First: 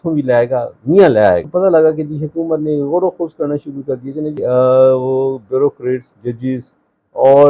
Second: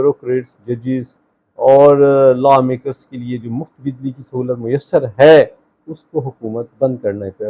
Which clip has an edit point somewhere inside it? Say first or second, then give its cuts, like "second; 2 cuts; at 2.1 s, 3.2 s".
first; 2 cuts; at 1.5 s, 4.4 s